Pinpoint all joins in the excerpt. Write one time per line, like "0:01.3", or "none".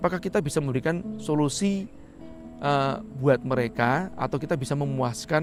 none